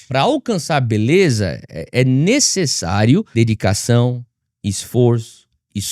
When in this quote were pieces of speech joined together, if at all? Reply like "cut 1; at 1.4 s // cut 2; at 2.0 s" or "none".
cut 1; at 3.3 s